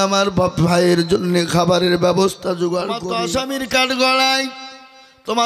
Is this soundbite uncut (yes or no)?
no